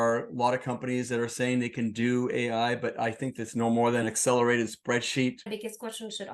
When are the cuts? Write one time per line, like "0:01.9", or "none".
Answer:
0:04.0
0:05.4